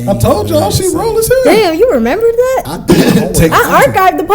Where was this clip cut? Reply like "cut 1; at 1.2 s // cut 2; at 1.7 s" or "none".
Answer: cut 1; at 2.7 s